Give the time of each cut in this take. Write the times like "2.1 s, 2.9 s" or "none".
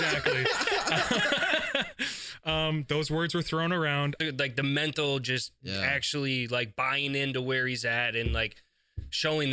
4.2 s